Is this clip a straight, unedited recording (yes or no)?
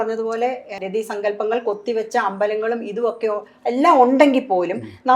yes